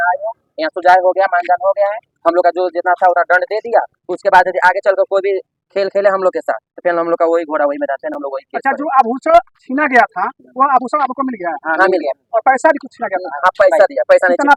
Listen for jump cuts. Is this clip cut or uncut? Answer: uncut